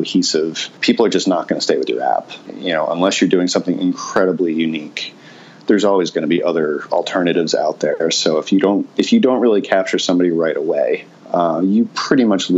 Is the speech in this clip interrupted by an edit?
yes; 1 cut; at 11.1 s

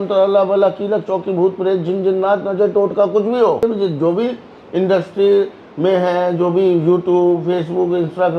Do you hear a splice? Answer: yes; 1 cut; at 3.6 s

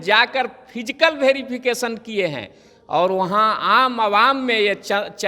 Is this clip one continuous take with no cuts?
yes; 0 cuts

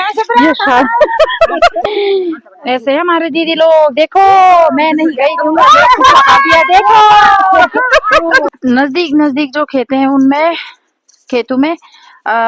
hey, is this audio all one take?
no; 2 cuts; at 1.8 s, 8.5 s

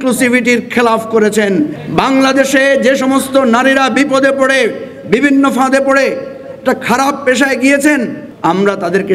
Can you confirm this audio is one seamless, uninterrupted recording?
no; 2 cuts; at 1.8 s, 8.2 s

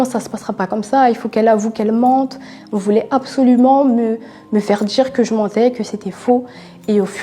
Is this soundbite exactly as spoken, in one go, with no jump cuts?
yes; 0 cuts

